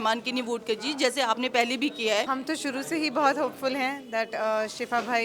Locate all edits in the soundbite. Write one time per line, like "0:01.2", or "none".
0:02.3